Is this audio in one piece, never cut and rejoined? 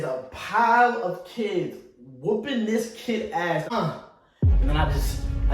no; 1 cut; at 3.7 s

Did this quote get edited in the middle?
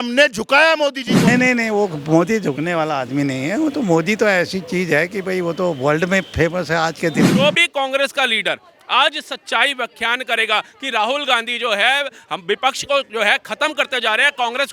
yes; 2 cuts; at 1.3 s, 7.3 s

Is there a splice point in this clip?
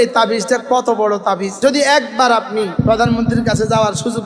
yes; 2 cuts; at 1.5 s, 2.7 s

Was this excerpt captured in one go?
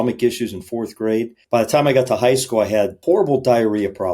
no; 2 cuts; at 1.4 s, 3.0 s

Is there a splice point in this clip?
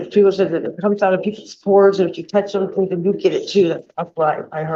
no; 0 cuts

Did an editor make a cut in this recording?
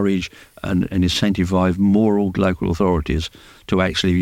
no; 0 cuts

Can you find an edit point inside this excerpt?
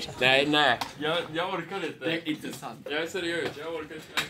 no; 0 cuts

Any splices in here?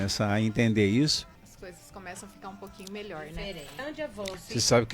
yes; 2 cuts; at 1.4 s, 3.8 s

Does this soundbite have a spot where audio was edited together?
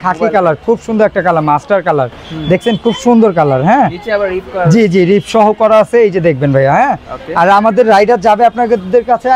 no; 0 cuts

